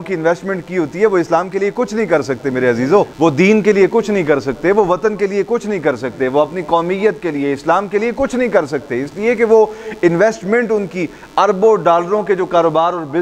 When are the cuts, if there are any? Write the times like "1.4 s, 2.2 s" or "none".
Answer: none